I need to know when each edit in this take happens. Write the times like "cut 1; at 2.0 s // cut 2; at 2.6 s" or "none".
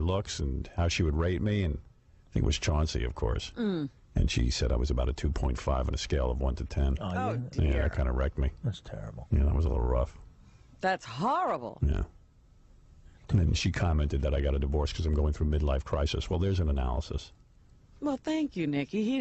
cut 1; at 6.1 s